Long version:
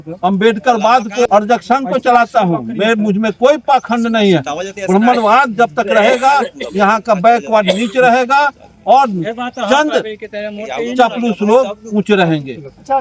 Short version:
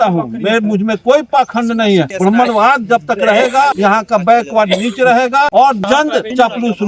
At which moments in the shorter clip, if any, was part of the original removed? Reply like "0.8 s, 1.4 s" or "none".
2.1 s, 3.8 s, 5.7 s